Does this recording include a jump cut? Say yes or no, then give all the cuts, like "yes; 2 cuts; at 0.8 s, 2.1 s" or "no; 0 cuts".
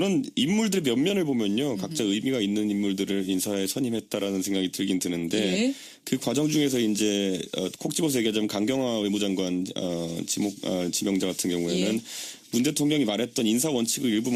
no; 0 cuts